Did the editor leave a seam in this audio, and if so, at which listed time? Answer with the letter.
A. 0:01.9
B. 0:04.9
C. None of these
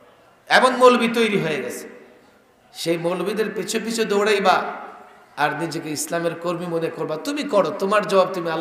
C